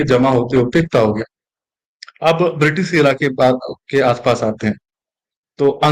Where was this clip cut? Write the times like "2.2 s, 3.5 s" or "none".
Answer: none